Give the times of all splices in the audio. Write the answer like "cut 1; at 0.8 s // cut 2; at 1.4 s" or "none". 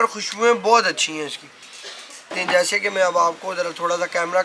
cut 1; at 2.3 s